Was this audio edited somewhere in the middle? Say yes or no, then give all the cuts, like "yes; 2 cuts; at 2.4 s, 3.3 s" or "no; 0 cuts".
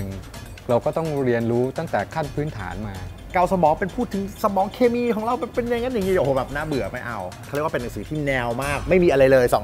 yes; 2 cuts; at 3.2 s, 7.4 s